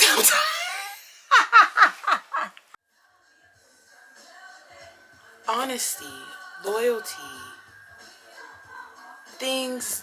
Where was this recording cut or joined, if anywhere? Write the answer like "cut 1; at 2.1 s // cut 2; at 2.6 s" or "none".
cut 1; at 2.6 s